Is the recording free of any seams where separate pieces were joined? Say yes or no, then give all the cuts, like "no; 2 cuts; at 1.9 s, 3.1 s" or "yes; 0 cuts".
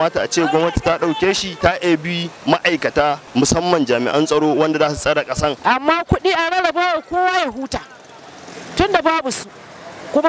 no; 3 cuts; at 1.5 s, 3.2 s, 5.6 s